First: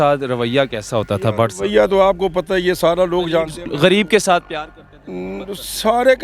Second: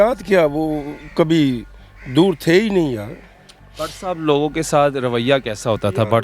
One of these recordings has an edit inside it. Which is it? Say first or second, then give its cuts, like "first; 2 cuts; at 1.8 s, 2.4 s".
second; 1 cut; at 3.6 s